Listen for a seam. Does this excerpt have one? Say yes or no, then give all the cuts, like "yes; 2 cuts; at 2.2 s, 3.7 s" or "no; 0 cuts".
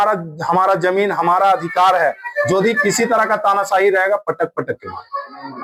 no; 0 cuts